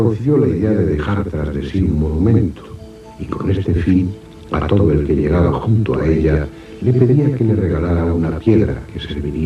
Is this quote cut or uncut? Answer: cut